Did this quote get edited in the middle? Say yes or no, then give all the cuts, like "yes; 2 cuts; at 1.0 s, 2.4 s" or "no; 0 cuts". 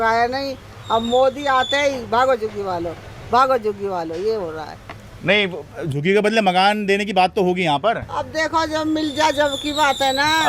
no; 0 cuts